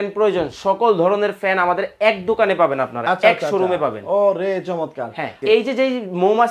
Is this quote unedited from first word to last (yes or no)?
no